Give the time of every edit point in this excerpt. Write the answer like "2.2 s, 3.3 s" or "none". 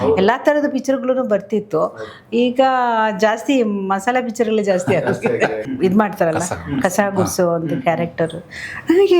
5.6 s